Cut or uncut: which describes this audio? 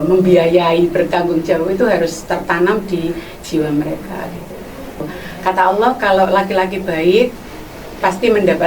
cut